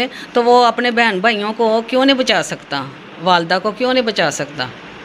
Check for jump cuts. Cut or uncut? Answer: uncut